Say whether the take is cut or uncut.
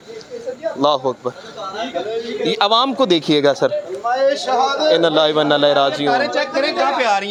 uncut